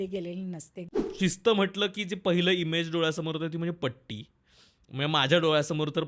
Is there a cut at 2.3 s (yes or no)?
no